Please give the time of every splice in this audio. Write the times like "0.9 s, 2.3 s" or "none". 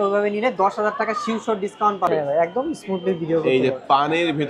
2.1 s